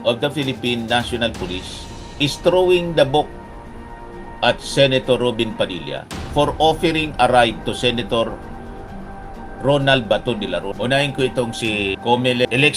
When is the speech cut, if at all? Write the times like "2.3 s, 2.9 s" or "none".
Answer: 10.7 s